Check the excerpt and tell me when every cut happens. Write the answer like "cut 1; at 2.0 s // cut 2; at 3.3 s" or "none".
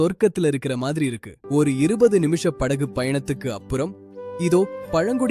cut 1; at 1.3 s